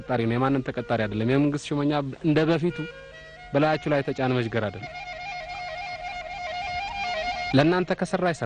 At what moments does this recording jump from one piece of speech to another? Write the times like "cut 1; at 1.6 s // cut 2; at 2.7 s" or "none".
none

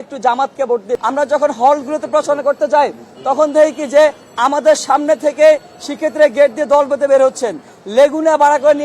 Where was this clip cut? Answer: cut 1; at 1.0 s

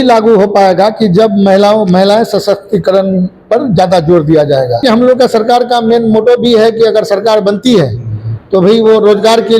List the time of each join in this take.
cut 1; at 4.8 s

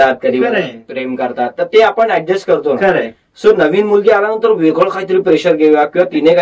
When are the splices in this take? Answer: none

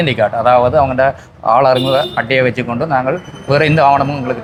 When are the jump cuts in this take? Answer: none

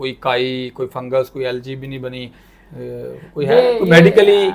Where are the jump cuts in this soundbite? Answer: none

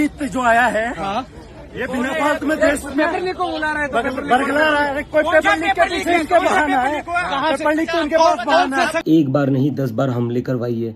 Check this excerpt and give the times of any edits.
cut 1; at 9.0 s

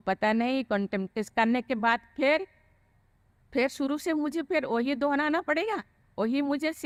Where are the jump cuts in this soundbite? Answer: none

